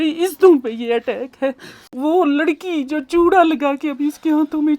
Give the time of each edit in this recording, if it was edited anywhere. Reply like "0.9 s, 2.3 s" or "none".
1.9 s